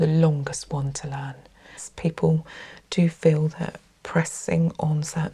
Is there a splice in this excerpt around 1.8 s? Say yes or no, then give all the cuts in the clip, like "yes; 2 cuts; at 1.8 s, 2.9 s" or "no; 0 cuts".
yes; 1 cut; at 1.8 s